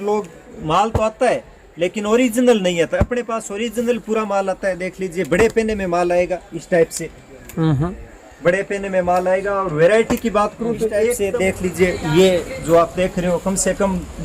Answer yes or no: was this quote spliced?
yes